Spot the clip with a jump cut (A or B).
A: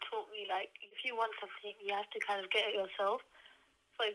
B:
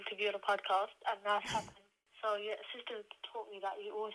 A